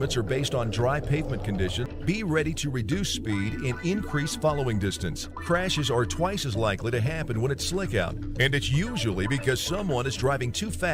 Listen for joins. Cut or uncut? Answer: cut